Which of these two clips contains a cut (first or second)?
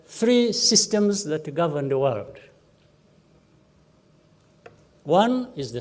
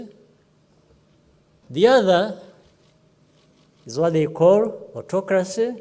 second